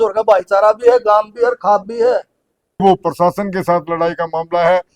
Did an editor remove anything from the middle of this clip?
yes; 1 cut; at 2.8 s

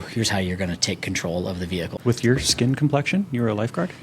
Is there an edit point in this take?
yes; 1 cut; at 1.9 s

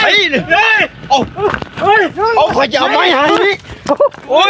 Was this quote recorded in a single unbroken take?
yes; 0 cuts

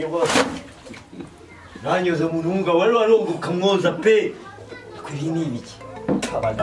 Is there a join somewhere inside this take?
no; 0 cuts

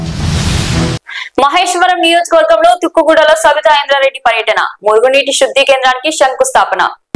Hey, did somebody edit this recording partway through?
yes; 1 cut; at 1.0 s

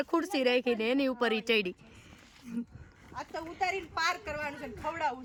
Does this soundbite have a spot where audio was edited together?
no; 0 cuts

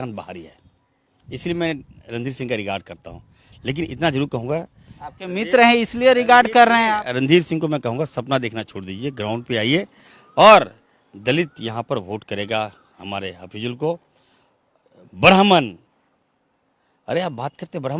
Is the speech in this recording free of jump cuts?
yes; 0 cuts

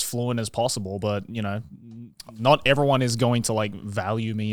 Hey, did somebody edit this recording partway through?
no; 0 cuts

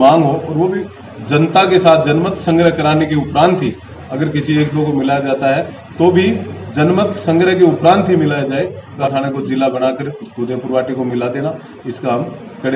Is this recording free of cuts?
no; 1 cut; at 8.9 s

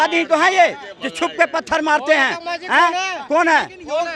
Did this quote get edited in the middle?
no; 0 cuts

